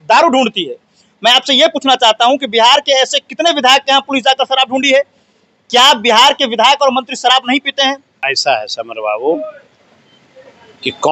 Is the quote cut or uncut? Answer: cut